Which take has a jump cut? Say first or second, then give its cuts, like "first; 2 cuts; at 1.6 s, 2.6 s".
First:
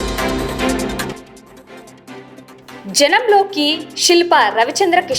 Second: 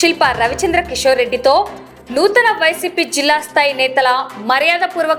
first; 2 cuts; at 1.2 s, 2.8 s